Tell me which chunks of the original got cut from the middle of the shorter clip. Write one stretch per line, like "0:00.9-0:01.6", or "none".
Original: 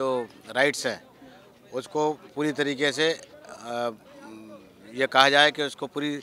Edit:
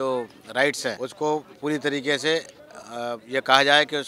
0:01.0-0:01.8
0:04.0-0:04.9